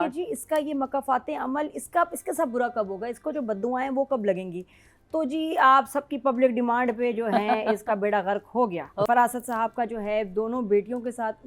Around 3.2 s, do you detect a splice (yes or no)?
no